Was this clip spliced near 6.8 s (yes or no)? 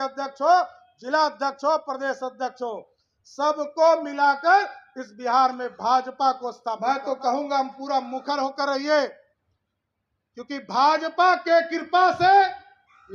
yes